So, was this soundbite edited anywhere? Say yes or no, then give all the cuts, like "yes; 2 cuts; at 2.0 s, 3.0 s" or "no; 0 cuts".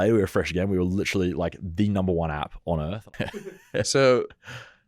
yes; 1 cut; at 3.5 s